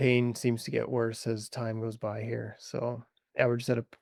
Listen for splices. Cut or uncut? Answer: uncut